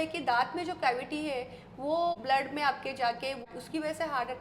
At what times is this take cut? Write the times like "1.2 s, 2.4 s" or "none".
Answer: 2.1 s, 3.5 s